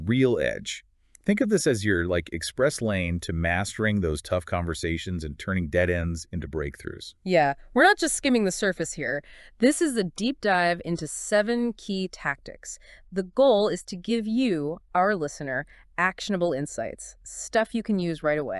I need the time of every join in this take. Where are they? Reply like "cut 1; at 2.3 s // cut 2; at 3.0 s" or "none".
cut 1; at 5.7 s